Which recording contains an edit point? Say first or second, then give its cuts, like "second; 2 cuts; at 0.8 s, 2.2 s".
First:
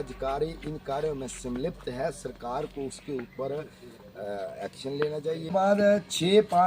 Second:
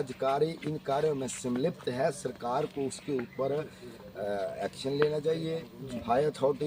first; 1 cut; at 5.5 s